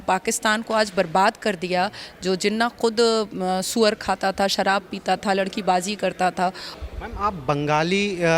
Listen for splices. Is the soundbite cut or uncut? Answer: cut